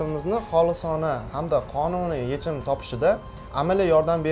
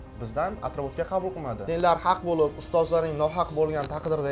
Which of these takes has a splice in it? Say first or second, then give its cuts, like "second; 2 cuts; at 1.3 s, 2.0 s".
second; 1 cut; at 1.5 s